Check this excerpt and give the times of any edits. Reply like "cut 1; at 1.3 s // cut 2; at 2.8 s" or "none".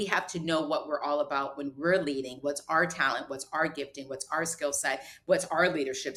none